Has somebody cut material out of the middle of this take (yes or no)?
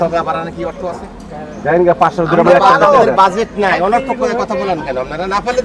no